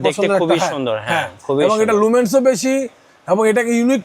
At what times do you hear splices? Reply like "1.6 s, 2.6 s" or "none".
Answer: none